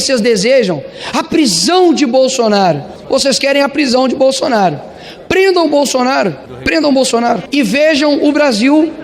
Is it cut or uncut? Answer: cut